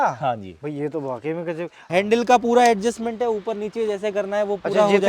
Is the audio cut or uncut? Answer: cut